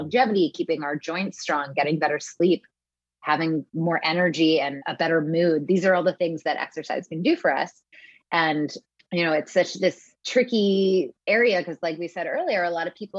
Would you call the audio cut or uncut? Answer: uncut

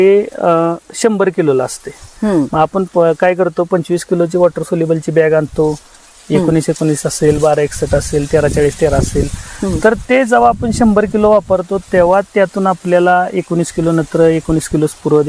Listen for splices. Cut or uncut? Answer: uncut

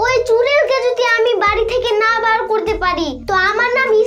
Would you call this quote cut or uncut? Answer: uncut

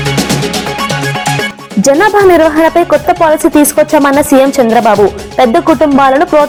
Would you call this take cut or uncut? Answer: uncut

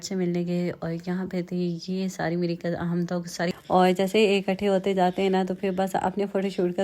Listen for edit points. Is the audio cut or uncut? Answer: cut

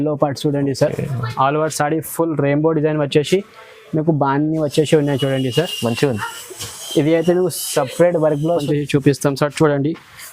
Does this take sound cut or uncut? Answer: cut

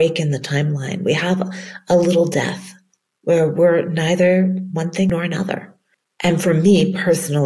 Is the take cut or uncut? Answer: cut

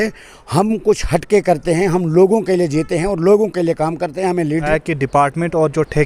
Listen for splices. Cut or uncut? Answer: cut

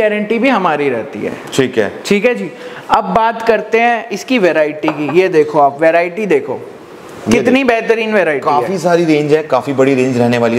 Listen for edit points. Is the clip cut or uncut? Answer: uncut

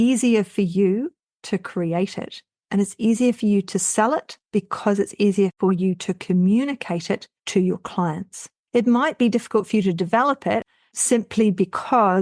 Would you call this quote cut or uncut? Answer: cut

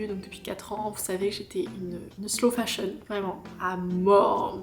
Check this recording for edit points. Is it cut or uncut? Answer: uncut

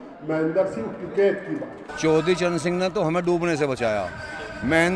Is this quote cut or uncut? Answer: cut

